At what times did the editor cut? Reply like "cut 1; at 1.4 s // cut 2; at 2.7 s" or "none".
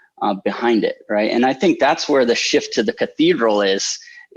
none